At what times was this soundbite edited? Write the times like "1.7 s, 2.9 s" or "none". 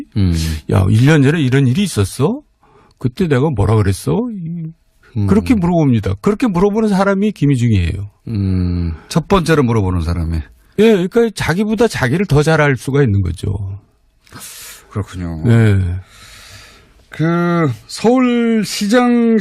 17.6 s